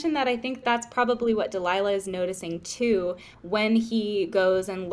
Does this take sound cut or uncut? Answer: uncut